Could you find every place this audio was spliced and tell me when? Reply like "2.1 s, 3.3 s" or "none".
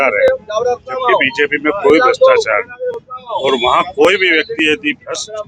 none